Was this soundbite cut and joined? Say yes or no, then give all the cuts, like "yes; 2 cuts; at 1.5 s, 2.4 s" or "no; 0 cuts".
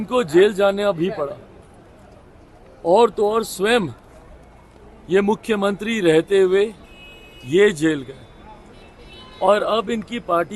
no; 0 cuts